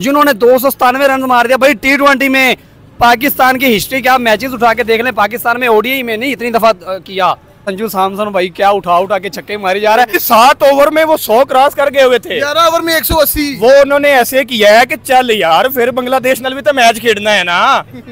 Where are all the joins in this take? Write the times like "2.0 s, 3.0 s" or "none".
7.7 s, 10.2 s